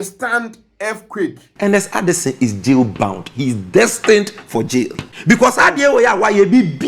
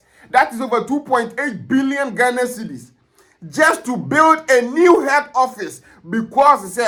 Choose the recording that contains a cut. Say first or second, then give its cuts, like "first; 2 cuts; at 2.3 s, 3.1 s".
first; 1 cut; at 1.4 s